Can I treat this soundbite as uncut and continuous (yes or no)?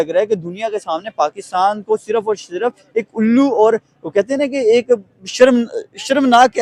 yes